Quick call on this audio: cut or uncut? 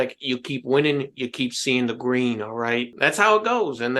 cut